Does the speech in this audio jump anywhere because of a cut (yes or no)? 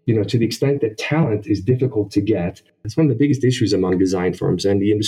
yes